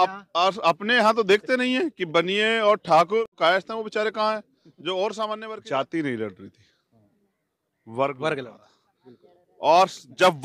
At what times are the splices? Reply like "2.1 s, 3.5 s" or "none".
3.3 s, 5.4 s